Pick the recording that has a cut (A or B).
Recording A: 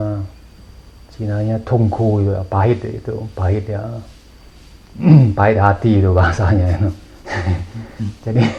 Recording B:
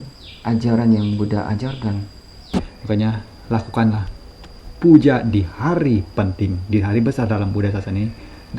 B